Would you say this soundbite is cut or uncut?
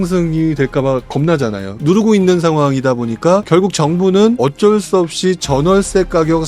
cut